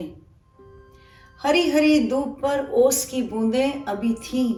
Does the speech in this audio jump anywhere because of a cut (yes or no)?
no